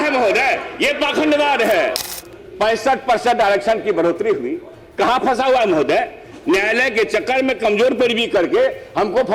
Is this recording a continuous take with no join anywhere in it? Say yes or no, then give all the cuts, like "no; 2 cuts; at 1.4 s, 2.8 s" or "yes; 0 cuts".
no; 1 cut; at 2.1 s